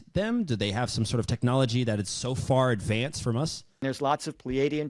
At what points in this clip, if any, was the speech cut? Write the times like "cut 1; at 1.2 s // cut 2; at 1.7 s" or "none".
cut 1; at 3.8 s